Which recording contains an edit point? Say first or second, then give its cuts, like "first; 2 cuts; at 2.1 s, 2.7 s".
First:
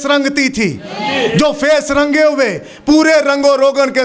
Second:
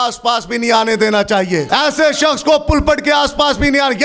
second; 1 cut; at 1.7 s